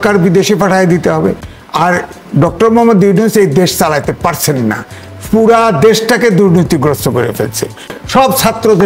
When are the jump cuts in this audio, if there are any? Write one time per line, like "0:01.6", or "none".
0:01.5
0:07.9